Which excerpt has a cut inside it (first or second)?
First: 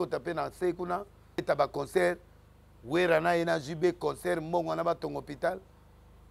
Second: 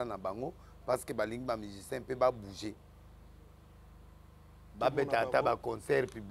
first